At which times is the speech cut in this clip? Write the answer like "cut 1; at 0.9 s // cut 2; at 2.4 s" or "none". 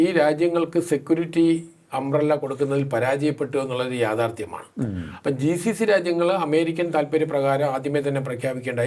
none